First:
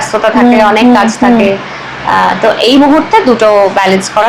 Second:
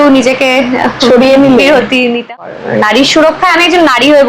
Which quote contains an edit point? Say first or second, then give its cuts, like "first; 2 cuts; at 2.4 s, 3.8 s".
second; 1 cut; at 2.3 s